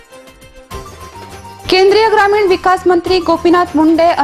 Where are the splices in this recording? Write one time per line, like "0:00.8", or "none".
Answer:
0:00.7
0:01.6